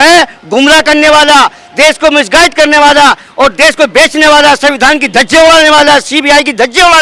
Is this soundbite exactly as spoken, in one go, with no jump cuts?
yes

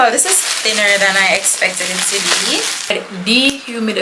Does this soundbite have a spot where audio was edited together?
yes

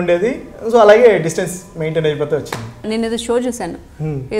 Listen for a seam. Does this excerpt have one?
yes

